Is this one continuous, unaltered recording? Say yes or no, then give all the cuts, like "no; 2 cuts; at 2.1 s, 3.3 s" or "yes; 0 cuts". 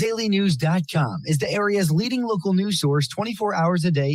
yes; 0 cuts